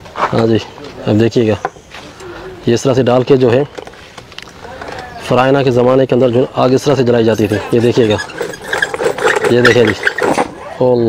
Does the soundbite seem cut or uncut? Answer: uncut